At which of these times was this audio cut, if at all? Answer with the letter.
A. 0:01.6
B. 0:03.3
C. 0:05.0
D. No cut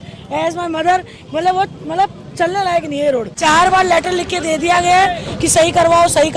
B